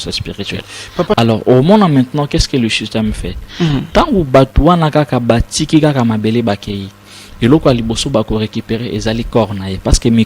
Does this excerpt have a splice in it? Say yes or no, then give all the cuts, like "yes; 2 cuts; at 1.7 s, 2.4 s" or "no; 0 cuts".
yes; 1 cut; at 1.1 s